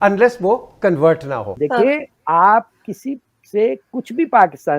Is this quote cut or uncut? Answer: cut